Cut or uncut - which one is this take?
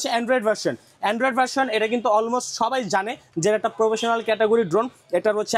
uncut